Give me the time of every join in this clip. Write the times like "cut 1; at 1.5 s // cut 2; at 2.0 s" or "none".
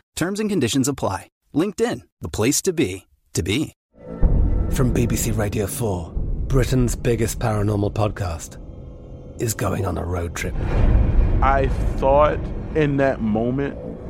cut 1; at 3.8 s